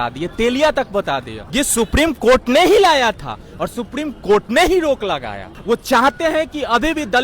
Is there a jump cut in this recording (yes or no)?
yes